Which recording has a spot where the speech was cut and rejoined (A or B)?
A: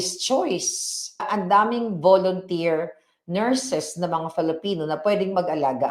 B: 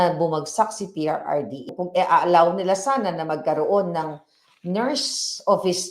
B